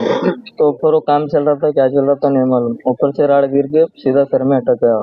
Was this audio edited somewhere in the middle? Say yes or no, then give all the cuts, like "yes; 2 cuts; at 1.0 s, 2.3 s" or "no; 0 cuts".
no; 0 cuts